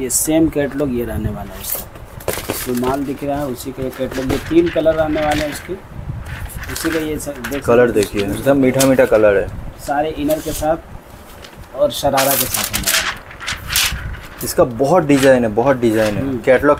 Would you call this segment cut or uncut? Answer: uncut